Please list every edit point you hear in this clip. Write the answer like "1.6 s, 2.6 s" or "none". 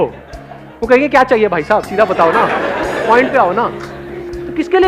none